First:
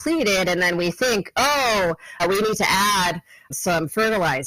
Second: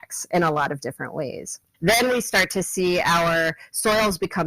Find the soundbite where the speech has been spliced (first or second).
second